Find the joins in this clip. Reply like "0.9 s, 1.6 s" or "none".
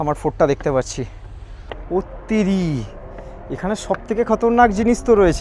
1.6 s